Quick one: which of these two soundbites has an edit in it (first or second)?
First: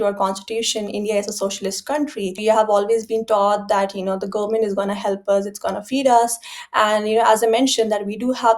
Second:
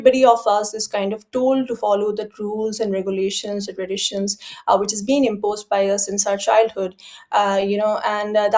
first